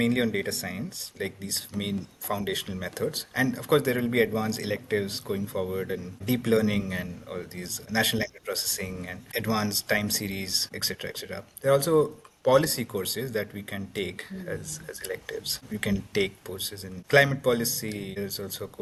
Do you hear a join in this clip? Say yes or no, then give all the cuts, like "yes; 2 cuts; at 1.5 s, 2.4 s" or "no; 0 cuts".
no; 0 cuts